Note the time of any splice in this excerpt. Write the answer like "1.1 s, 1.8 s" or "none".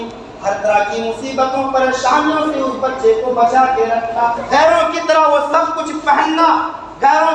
4.4 s